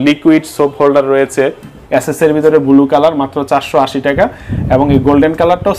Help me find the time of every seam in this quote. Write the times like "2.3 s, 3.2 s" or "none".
1.7 s